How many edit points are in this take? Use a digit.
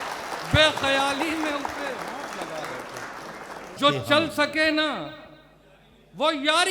1